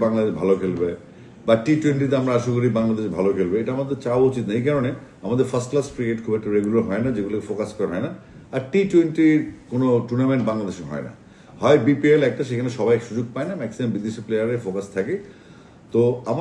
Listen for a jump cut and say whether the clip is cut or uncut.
uncut